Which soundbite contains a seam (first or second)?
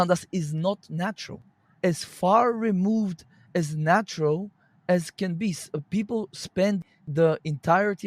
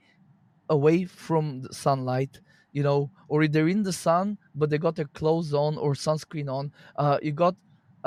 first